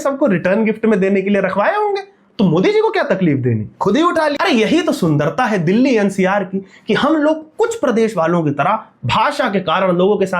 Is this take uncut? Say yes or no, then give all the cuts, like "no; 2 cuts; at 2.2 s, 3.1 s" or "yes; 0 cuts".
no; 1 cut; at 4.4 s